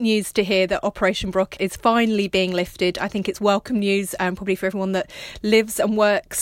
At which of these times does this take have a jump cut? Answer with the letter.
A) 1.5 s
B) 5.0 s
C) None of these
A